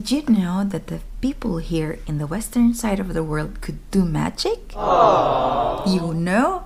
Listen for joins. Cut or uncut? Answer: uncut